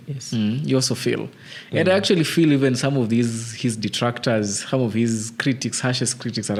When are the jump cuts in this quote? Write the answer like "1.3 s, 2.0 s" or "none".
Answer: none